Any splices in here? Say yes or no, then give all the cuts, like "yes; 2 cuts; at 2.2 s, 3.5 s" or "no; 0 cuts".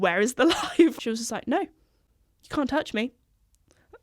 yes; 1 cut; at 1.0 s